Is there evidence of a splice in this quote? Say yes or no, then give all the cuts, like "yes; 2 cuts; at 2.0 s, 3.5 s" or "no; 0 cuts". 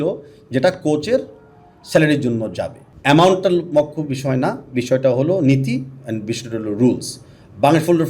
yes; 1 cut; at 2.8 s